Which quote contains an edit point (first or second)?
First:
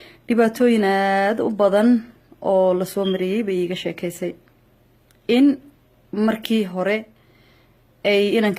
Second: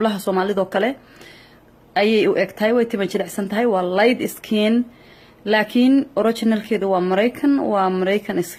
first